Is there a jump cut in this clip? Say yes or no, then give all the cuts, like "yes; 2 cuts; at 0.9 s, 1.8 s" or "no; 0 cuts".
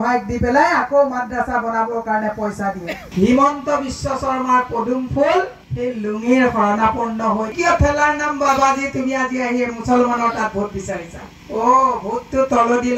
yes; 3 cuts; at 3.1 s, 7.5 s, 11.4 s